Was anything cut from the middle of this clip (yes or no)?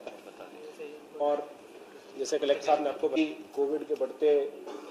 yes